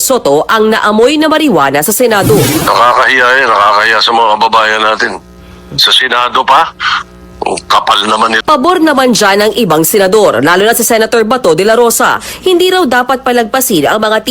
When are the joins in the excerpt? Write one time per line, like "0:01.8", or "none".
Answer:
0:08.4